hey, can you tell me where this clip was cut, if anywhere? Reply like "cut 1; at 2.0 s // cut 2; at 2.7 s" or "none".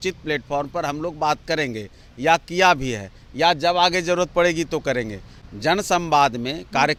none